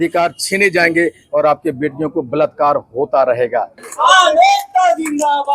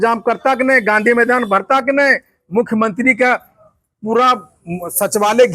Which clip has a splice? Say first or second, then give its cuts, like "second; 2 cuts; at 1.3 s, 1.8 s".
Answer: first; 1 cut; at 3.8 s